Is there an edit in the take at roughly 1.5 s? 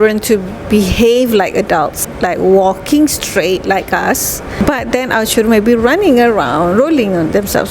no; 1 cut; at 4.6 s

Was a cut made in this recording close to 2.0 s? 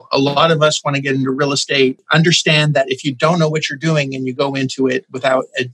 yes; 1 cut; at 2.0 s

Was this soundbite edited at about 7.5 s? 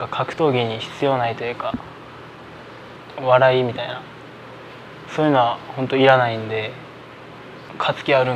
yes; 2 cuts; at 2.6 s, 7.5 s

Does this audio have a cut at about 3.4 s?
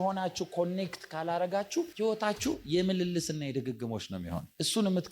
no; 1 cut; at 1.9 s

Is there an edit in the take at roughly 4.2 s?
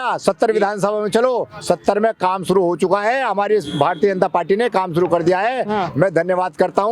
no; 0 cuts

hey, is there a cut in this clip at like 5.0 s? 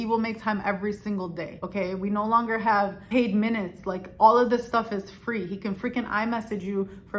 no; 1 cut; at 1.6 s

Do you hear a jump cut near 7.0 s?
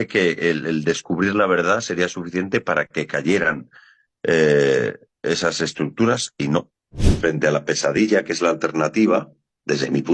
yes; 1 cut; at 7.0 s

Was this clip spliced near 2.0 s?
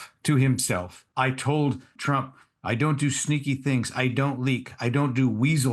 yes; 2 cuts; at 1.0 s, 2.0 s

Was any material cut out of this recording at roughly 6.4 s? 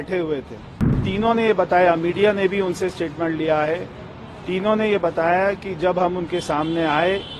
no; 1 cut; at 1.1 s

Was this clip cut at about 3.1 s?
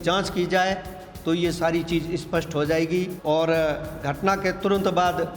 yes; 1 cut; at 3.1 s

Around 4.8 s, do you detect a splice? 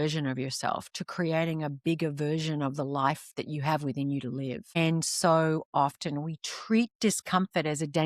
yes; 1 cut; at 4.8 s

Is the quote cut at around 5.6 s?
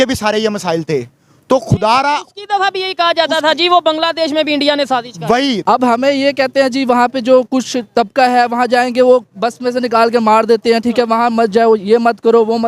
yes; 1 cut; at 5.6 s

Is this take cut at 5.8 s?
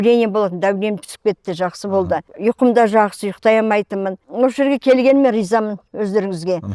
no; 2 cuts; at 2.3 s, 4.2 s

